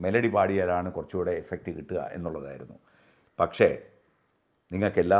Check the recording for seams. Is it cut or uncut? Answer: uncut